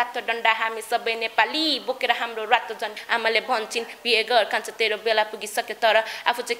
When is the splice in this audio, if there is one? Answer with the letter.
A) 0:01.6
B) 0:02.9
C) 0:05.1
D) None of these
B